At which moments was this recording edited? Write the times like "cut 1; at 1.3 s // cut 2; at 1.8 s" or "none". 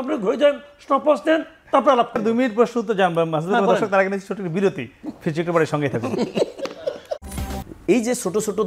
cut 1; at 2.2 s // cut 2; at 7.4 s